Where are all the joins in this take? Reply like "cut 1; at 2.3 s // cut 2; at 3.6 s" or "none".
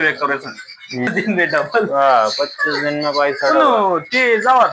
cut 1; at 1.1 s